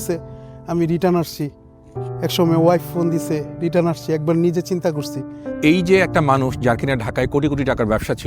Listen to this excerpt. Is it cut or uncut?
cut